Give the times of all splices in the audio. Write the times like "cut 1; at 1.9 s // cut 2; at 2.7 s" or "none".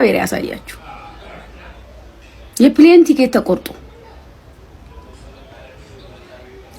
none